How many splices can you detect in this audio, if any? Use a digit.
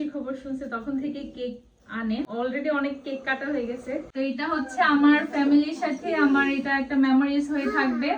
2